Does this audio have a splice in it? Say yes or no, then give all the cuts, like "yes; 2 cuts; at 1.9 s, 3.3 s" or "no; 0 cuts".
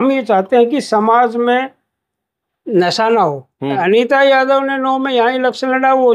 yes; 1 cut; at 3.8 s